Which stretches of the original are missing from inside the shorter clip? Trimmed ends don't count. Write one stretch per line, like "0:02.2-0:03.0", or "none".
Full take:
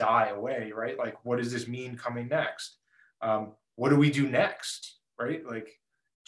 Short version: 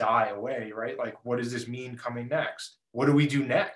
0:02.8-0:03.6